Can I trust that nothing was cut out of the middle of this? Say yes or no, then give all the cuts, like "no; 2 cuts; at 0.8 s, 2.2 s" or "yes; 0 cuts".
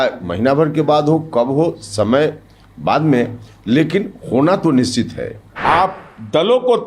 no; 1 cut; at 5.4 s